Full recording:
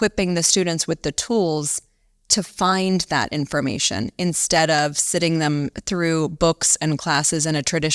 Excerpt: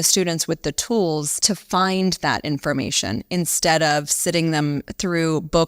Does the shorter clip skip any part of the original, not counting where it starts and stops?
yes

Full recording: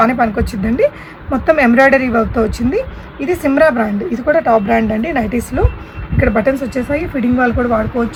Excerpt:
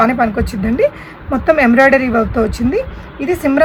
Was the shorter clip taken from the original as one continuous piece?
yes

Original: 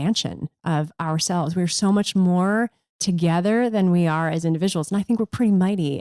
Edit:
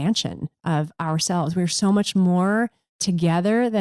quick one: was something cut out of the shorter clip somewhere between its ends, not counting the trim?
no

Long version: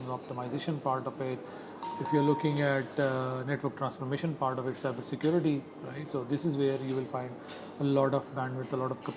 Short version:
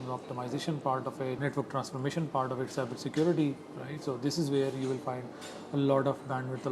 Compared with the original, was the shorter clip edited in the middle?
yes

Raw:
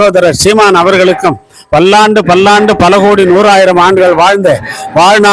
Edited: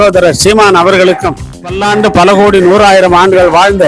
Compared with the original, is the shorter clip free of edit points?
no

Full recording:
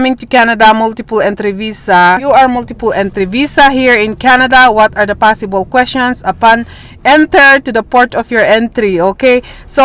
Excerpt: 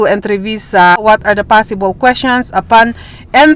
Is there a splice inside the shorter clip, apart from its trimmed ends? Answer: yes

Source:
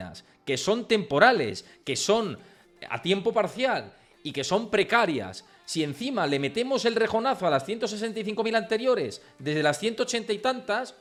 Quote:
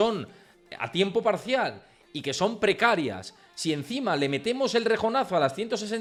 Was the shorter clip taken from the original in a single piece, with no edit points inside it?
yes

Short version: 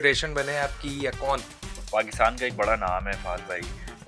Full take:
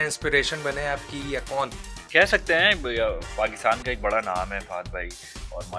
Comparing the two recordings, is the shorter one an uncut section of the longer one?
no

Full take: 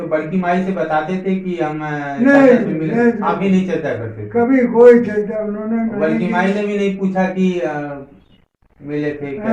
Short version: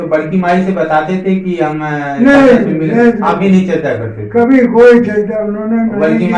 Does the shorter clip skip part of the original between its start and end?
no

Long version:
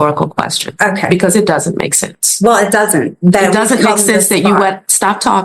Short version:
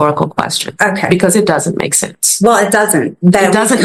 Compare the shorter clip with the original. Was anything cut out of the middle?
no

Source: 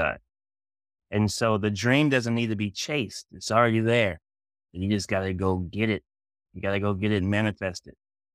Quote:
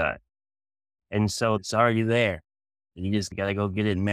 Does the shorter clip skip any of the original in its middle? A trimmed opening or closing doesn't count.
yes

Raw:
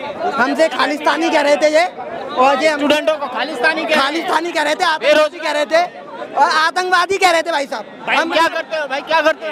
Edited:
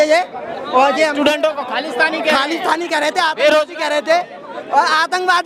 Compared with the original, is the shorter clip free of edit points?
yes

